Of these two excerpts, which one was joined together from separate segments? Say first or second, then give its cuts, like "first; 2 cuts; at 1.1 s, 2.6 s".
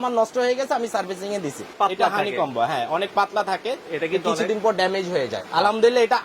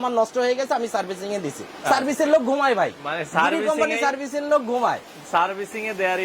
first; 1 cut; at 1.7 s